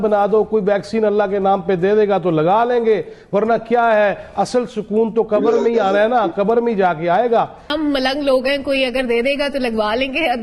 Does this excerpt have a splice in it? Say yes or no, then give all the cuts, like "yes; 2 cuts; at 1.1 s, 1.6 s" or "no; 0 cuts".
yes; 1 cut; at 7.7 s